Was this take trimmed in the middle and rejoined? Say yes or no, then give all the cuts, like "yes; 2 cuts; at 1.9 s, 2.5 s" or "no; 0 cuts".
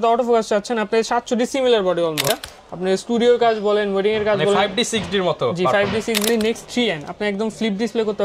yes; 2 cuts; at 2.2 s, 6.3 s